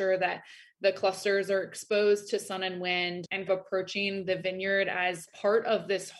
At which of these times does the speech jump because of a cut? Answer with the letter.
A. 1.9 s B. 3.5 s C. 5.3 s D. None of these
B